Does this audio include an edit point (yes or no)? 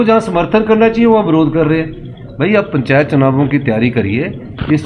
no